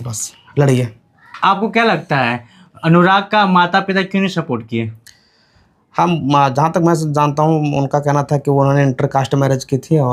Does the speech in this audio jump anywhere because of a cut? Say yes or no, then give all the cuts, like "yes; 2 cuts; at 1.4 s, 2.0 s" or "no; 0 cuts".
no; 0 cuts